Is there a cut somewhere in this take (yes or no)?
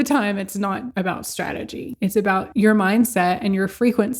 yes